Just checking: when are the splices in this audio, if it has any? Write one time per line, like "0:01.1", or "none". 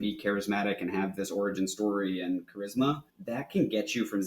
0:03.1